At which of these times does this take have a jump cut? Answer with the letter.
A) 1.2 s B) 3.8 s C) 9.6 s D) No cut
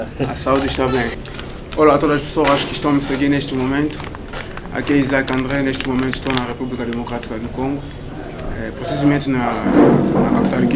A